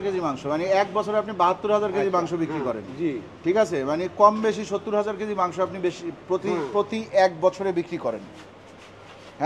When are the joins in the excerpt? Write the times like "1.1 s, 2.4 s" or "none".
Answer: none